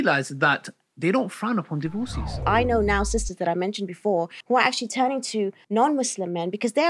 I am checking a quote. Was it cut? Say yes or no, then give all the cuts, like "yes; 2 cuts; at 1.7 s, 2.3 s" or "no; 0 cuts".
yes; 3 cuts; at 2.3 s, 4.4 s, 5.6 s